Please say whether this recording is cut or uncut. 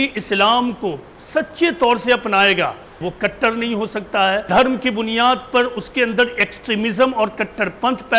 cut